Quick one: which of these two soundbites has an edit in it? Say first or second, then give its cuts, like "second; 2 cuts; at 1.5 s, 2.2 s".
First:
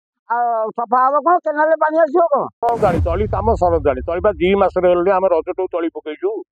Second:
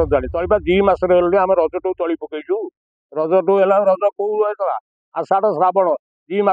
first; 1 cut; at 2.8 s